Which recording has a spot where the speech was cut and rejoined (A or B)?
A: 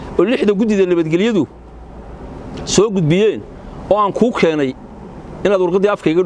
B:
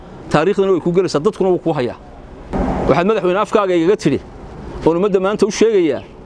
B